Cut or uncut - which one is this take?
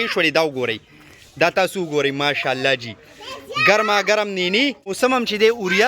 cut